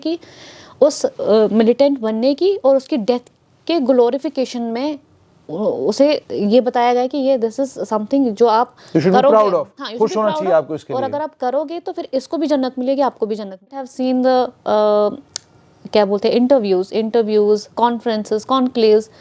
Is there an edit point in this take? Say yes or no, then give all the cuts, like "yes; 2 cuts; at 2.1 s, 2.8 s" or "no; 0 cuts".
yes; 1 cut; at 13.9 s